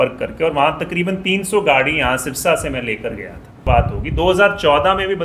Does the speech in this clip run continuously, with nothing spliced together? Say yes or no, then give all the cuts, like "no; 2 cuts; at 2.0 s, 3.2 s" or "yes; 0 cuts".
no; 1 cut; at 3.5 s